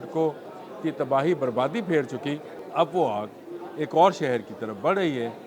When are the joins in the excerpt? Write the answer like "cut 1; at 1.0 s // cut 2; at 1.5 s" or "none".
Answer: cut 1; at 2.6 s